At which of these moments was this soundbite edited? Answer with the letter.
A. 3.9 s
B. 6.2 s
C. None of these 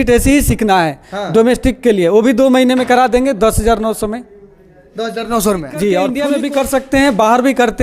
B